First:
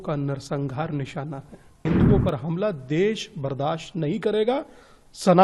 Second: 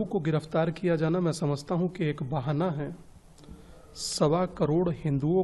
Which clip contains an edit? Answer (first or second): first